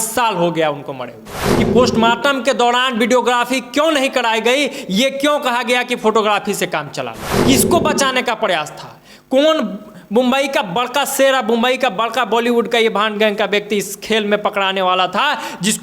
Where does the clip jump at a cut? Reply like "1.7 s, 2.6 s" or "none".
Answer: 1.4 s, 7.3 s